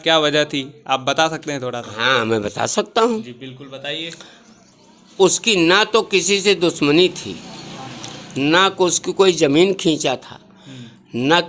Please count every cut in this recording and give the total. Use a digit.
0